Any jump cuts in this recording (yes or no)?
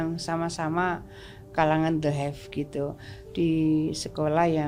no